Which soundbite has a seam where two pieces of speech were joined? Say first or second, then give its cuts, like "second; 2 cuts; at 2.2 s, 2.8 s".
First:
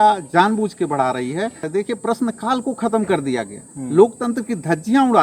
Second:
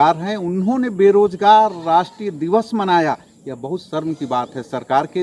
first; 1 cut; at 1.7 s